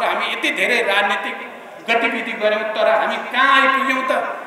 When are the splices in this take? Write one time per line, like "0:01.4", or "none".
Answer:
none